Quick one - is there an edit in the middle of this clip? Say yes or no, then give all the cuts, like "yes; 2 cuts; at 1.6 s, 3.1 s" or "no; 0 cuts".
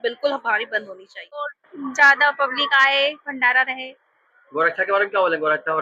yes; 1 cut; at 1.2 s